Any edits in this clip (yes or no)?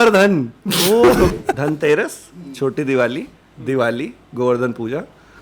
yes